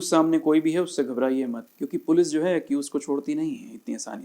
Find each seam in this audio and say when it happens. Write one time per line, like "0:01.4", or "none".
0:01.6